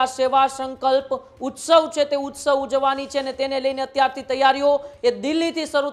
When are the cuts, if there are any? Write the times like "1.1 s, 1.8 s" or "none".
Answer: none